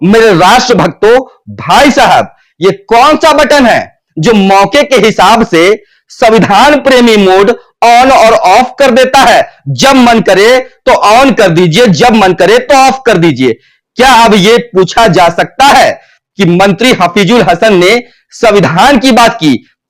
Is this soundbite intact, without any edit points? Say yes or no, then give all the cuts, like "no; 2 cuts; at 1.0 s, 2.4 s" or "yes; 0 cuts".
yes; 0 cuts